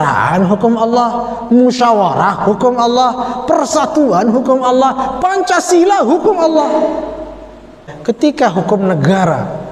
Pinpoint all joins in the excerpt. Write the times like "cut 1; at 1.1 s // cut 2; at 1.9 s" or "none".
cut 1; at 7.9 s